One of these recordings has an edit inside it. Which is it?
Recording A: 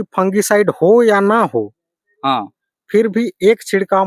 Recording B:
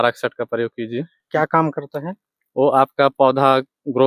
B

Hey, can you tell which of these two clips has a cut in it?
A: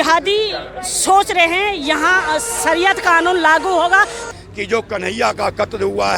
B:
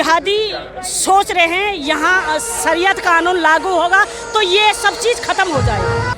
A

